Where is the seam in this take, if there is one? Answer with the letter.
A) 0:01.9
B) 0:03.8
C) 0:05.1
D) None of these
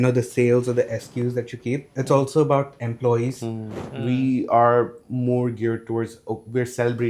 B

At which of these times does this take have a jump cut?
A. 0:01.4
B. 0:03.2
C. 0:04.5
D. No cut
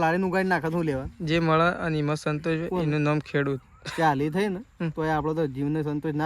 D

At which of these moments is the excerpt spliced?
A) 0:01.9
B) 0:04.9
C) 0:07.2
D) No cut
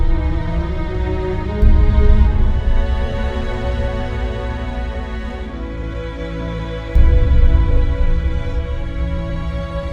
D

